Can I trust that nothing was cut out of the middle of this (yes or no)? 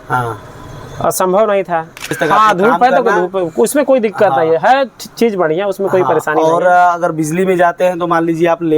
no